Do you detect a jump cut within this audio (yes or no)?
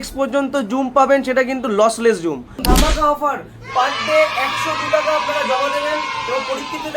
yes